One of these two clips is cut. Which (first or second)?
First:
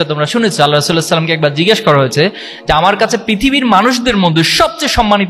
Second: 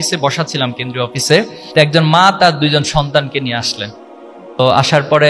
second